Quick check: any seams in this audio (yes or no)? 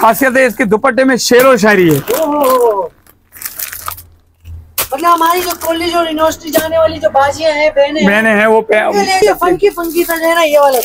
yes